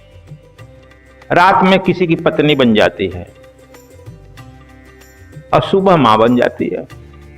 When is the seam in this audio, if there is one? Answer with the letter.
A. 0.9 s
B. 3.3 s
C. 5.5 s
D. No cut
A